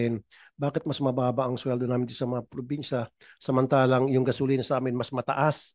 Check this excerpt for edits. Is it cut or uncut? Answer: uncut